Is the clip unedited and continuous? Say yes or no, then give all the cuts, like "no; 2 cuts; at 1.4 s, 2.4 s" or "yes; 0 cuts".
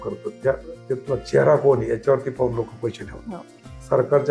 yes; 0 cuts